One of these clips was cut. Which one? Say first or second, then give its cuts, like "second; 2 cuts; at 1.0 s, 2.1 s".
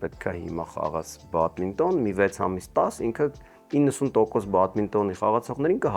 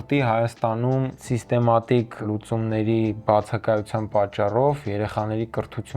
second; 2 cuts; at 1.2 s, 2.2 s